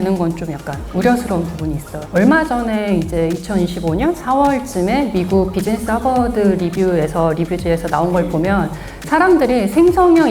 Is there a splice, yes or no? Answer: yes